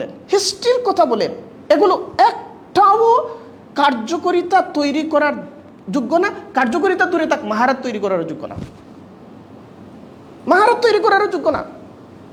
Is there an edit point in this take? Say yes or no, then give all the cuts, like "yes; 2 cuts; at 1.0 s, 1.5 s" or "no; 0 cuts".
no; 0 cuts